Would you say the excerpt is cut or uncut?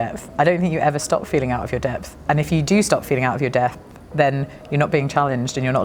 cut